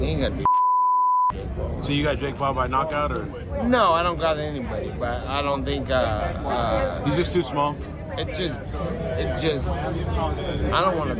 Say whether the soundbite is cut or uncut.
uncut